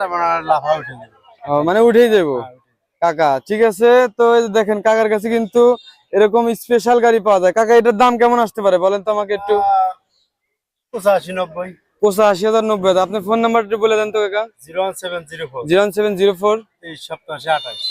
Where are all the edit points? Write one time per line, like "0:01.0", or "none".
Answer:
none